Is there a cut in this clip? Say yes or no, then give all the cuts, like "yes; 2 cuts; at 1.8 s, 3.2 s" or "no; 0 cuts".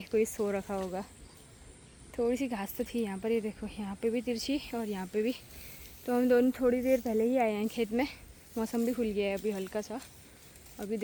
no; 0 cuts